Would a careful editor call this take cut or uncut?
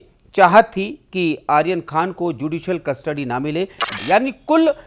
cut